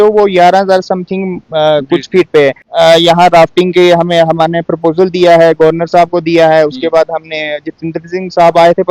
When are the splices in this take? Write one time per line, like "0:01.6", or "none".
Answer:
0:02.6